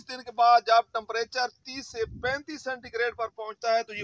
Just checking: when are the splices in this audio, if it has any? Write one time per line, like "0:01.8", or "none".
none

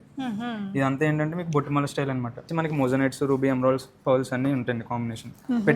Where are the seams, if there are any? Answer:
0:02.5

